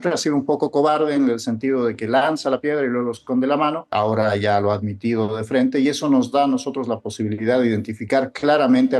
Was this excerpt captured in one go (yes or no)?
no